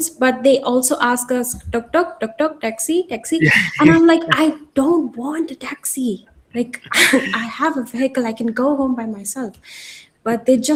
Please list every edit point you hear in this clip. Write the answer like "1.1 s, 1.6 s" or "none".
none